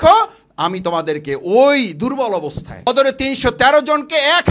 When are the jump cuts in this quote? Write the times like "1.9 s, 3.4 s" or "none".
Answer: 2.9 s